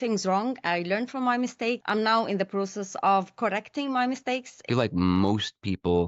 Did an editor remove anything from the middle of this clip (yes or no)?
yes